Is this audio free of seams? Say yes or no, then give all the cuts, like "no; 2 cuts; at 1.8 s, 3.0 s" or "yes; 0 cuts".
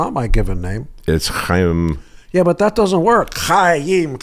yes; 0 cuts